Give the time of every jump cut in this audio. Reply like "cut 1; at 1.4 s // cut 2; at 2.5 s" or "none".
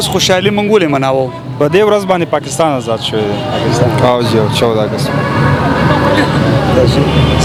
none